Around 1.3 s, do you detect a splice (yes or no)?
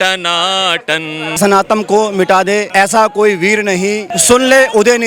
yes